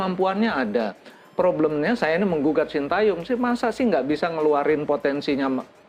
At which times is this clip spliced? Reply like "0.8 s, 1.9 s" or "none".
none